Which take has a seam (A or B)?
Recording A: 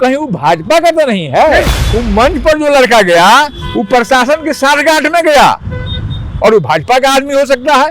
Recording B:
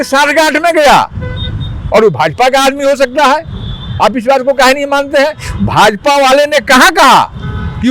A